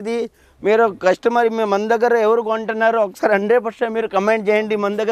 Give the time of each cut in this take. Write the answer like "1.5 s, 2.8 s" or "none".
none